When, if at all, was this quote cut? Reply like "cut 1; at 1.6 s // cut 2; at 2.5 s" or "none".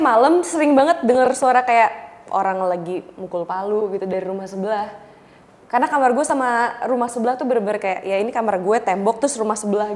none